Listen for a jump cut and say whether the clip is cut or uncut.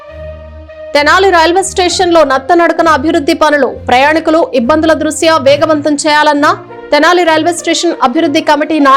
cut